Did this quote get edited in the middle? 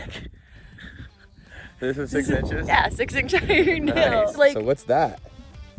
yes; 1 cut; at 4.3 s

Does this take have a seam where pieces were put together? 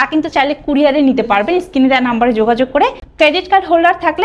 yes; 1 cut; at 3.0 s

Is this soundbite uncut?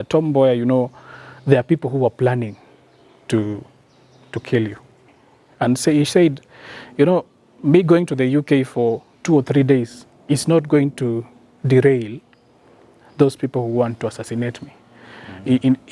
no; 1 cut; at 5.1 s

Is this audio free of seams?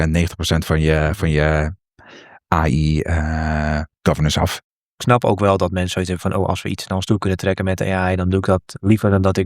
no; 1 cut; at 4.7 s

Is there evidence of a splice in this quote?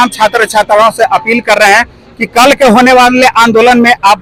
no; 0 cuts

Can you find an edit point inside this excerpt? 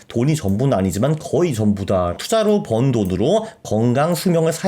yes; 1 cut; at 2.2 s

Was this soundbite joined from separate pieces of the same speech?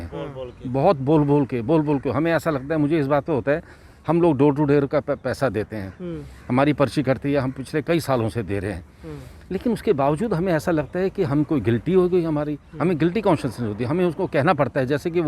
no; 0 cuts

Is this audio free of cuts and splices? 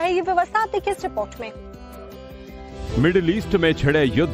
yes; 0 cuts

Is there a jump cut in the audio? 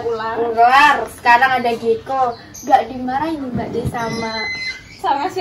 no; 0 cuts

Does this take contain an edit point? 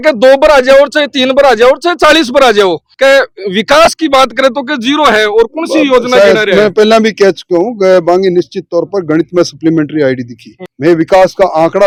no; 0 cuts

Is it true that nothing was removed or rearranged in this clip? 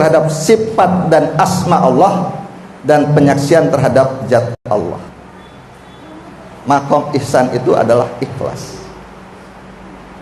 yes; 0 cuts

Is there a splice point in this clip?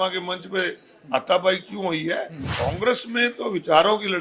yes; 1 cut; at 2.4 s

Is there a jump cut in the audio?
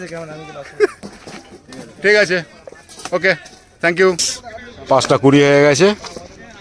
yes; 1 cut; at 4.3 s

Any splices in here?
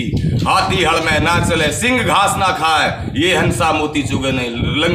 no; 0 cuts

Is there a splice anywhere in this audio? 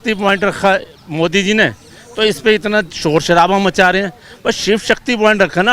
no; 0 cuts

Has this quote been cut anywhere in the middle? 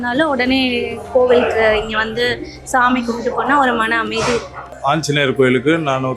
no; 0 cuts

